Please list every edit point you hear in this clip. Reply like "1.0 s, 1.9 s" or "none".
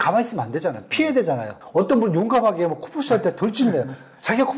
1.6 s